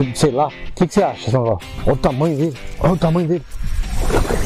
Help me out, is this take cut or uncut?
cut